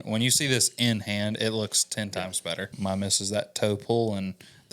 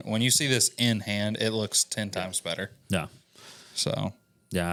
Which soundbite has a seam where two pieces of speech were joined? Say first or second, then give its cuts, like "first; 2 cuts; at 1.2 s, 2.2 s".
first; 1 cut; at 2.7 s